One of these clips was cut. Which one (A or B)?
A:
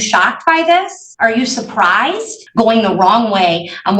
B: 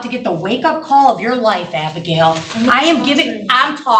A